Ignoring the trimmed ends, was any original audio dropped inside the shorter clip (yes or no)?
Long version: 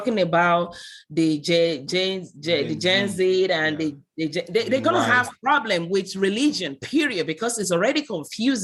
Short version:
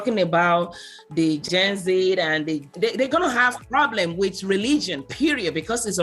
yes